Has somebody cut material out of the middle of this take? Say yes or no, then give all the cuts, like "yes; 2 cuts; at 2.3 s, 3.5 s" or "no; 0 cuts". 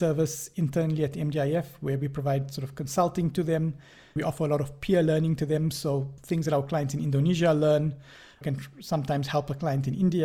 yes; 3 cuts; at 4.2 s, 6.1 s, 8.4 s